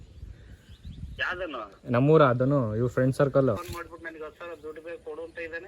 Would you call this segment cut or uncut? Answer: cut